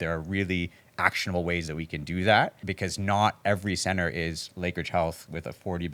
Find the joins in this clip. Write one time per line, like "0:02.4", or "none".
0:02.6